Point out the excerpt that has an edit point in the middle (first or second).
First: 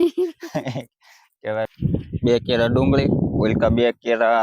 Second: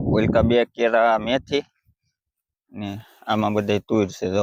first